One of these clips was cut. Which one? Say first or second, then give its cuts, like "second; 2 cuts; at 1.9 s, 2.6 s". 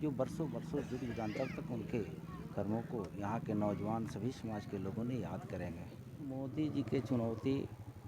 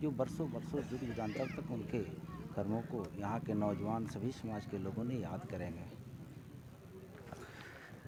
first; 1 cut; at 6.3 s